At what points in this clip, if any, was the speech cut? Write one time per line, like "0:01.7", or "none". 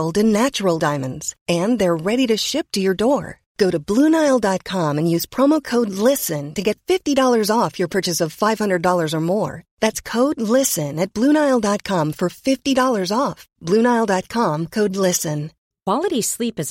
none